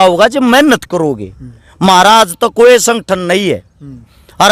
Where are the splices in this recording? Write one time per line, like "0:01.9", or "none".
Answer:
none